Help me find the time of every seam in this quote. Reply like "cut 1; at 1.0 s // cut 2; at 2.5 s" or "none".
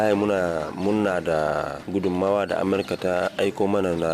cut 1; at 1.8 s